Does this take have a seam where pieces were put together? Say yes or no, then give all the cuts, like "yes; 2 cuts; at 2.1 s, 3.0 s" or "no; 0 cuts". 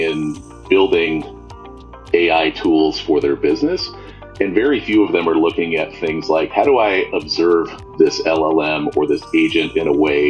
no; 0 cuts